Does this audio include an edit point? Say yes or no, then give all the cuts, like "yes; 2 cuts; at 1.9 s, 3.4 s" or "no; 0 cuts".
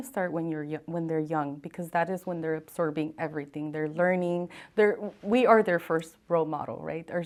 no; 0 cuts